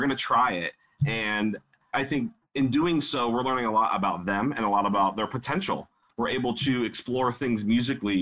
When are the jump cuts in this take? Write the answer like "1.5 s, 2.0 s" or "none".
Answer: 2.0 s, 6.0 s